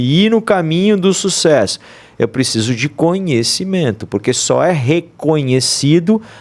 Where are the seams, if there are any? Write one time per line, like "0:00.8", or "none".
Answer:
none